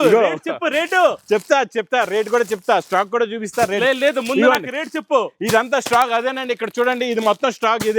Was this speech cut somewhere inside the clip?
no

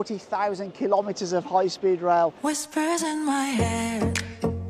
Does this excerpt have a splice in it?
yes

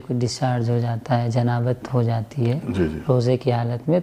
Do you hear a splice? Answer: no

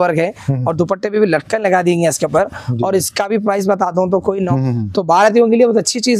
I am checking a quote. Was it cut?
yes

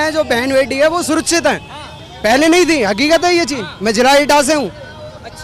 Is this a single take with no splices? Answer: yes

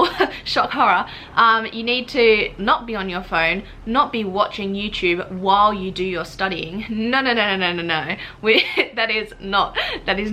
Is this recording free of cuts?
yes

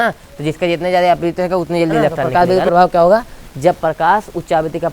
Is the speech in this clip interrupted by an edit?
yes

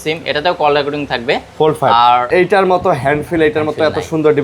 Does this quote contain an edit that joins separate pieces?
yes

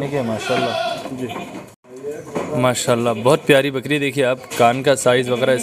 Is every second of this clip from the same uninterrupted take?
no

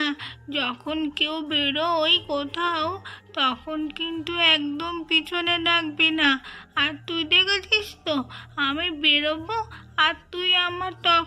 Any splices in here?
no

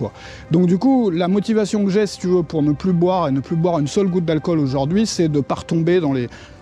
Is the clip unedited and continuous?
yes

